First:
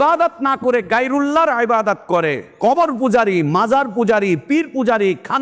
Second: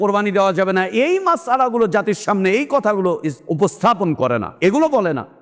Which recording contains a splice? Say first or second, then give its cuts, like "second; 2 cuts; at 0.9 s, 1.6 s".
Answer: second; 2 cuts; at 3.4 s, 4.5 s